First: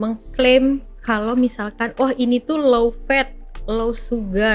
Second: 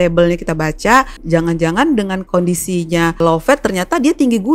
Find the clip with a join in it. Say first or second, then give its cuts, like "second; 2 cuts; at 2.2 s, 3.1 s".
second; 3 cuts; at 1.2 s, 2.2 s, 3.2 s